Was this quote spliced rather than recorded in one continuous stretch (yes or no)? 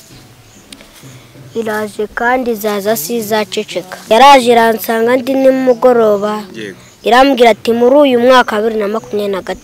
yes